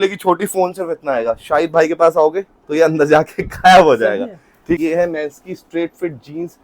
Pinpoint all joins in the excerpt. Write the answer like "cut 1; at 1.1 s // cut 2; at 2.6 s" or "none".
cut 1; at 4.8 s